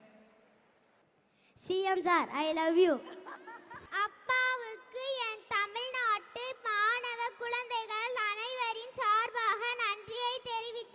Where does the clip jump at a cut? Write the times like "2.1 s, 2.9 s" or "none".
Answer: 1.0 s, 3.8 s